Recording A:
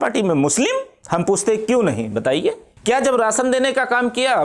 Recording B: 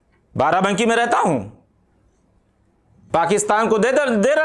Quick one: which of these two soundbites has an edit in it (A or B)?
A